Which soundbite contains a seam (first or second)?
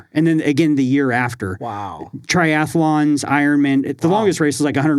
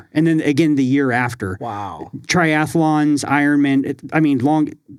first